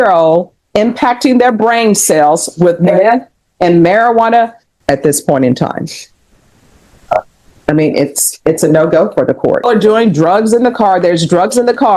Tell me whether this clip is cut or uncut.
cut